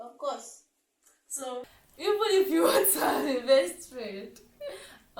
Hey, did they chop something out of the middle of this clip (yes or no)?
yes